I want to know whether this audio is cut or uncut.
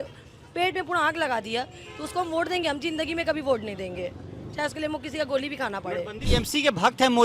cut